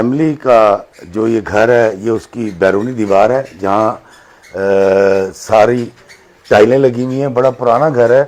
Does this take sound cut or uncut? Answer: uncut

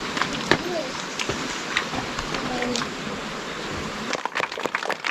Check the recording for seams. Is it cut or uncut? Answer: cut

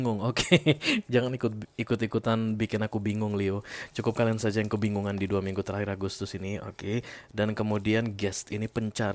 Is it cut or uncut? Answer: uncut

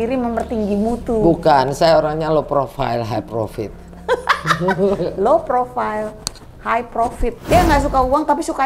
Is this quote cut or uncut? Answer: cut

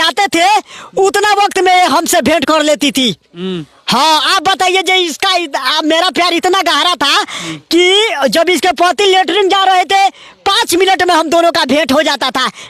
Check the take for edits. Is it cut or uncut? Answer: uncut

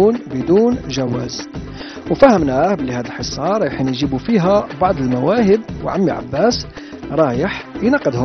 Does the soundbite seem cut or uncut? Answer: uncut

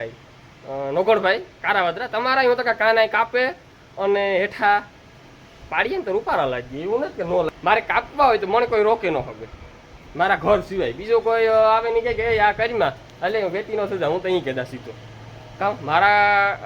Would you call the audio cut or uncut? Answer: cut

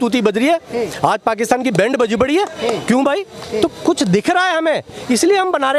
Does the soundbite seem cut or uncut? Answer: uncut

